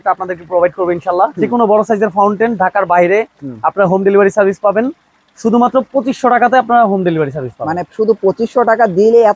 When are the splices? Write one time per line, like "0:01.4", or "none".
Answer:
0:01.4